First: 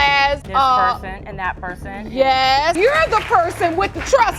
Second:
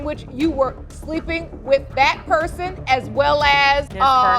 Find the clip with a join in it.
first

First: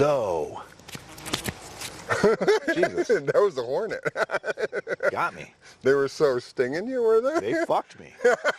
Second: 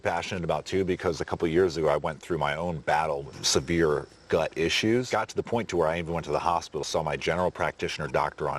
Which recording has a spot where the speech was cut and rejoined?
second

